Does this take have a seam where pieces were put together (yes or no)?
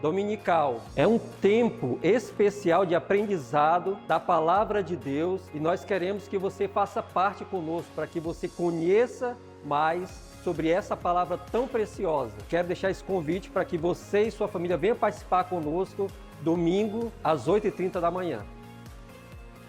no